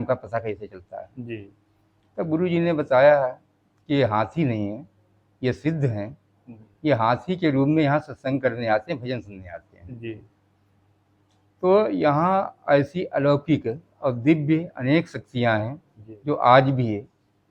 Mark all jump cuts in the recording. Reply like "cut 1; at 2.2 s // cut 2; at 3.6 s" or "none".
none